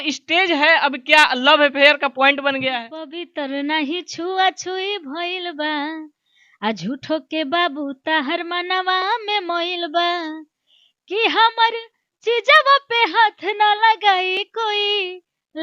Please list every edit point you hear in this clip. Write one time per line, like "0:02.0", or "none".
0:03.2